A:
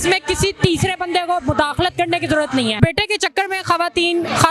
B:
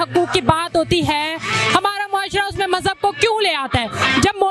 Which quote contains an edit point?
A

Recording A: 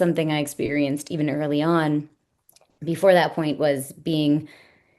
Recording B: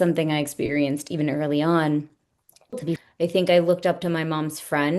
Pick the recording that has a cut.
B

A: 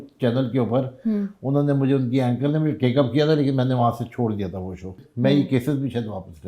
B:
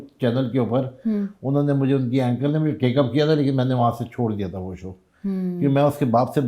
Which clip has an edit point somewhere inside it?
A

